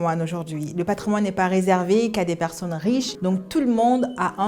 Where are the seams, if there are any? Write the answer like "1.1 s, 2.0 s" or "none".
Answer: 3.1 s